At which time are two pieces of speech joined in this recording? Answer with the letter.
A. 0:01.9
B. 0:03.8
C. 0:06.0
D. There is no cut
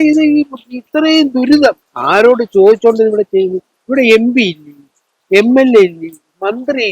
A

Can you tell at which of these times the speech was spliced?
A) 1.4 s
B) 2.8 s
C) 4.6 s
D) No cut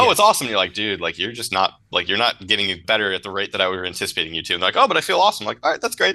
B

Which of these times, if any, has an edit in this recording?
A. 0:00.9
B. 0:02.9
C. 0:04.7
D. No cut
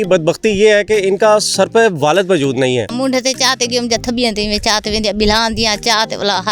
B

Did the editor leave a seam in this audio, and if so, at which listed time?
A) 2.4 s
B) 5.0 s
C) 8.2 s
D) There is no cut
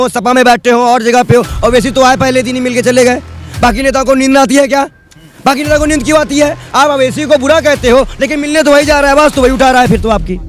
D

